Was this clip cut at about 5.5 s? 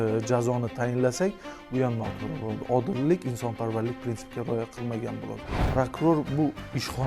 yes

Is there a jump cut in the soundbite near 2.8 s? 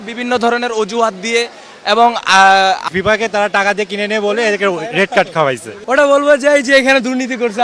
yes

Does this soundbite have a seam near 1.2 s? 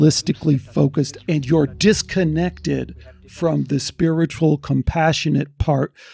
yes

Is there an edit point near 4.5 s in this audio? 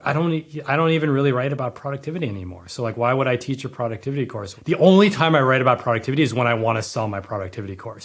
yes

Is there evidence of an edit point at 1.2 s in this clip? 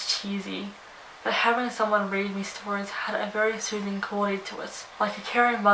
no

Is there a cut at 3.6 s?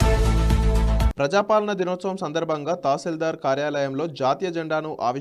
no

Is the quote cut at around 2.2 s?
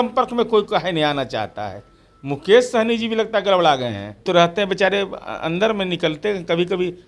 no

